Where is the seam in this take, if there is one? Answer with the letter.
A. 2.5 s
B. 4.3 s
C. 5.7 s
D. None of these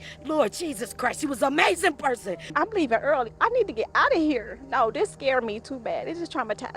A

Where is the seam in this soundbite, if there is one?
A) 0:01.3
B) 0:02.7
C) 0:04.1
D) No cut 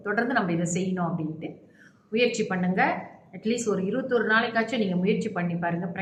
D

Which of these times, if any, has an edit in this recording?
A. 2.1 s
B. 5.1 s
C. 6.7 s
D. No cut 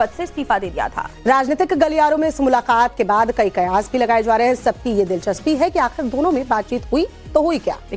C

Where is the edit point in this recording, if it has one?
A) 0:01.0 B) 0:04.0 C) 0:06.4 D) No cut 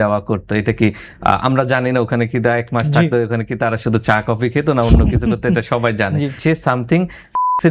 C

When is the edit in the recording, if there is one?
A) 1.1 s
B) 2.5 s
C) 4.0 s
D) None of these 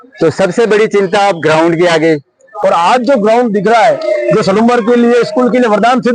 B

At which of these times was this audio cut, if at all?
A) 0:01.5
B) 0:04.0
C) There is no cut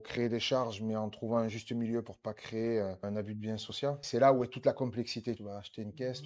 C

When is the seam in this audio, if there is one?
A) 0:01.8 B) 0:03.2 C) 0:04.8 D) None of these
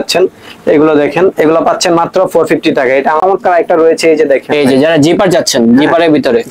B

